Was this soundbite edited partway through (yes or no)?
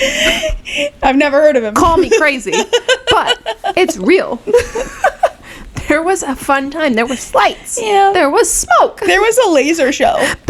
no